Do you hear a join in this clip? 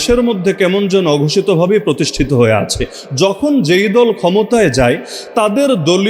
no; 0 cuts

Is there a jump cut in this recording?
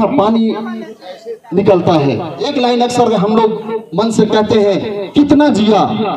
yes; 1 cut; at 2.3 s

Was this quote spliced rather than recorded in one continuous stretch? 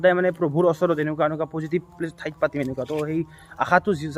no; 0 cuts

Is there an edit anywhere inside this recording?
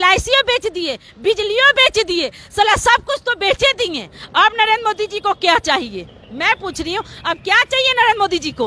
no; 0 cuts

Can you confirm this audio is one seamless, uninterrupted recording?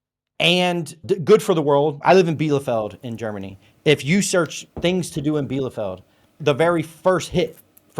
no; 1 cut; at 2.0 s

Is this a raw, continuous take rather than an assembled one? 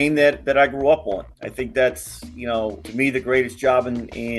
no; 1 cut; at 2.8 s

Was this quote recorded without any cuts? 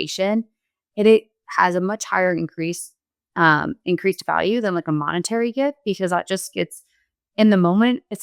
yes; 0 cuts

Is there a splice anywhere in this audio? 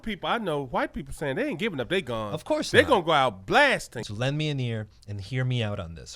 yes; 1 cut; at 3.9 s

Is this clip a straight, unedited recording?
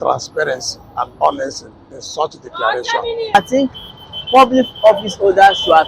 no; 1 cut; at 3.3 s

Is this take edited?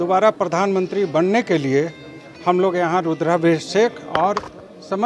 no; 0 cuts

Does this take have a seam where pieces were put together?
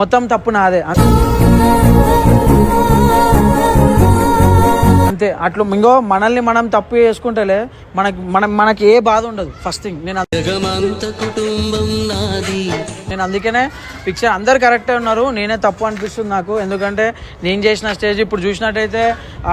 no; 0 cuts

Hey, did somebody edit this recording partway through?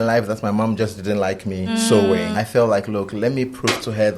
yes; 2 cuts; at 1.7 s, 2.3 s

